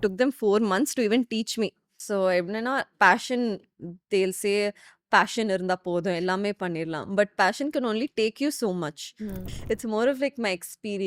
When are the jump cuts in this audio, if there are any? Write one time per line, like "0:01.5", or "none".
0:01.9
0:09.4